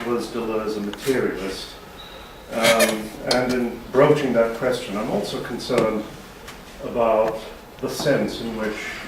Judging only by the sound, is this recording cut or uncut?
cut